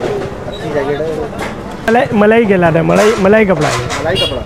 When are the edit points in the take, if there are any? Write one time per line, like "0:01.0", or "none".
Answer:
0:01.9